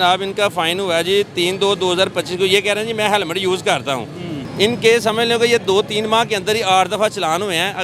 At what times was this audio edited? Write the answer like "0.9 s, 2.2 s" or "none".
4.4 s